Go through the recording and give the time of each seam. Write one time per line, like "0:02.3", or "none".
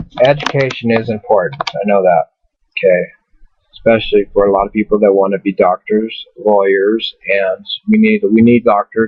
0:01.8